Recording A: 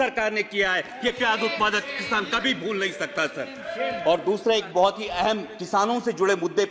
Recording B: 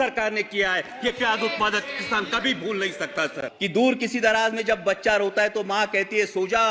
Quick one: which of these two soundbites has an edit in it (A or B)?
B